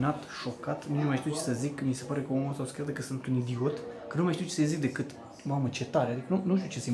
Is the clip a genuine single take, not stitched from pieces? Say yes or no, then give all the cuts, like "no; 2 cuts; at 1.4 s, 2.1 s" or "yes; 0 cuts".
yes; 0 cuts